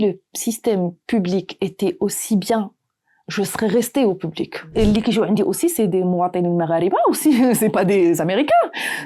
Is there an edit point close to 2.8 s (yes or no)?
no